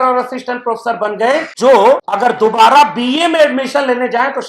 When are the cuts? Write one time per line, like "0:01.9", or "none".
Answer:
0:01.5
0:02.1